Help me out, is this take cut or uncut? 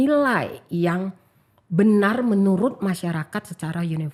uncut